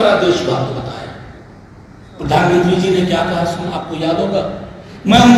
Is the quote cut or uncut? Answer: uncut